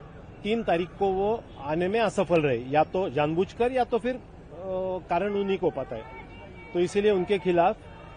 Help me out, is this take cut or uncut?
uncut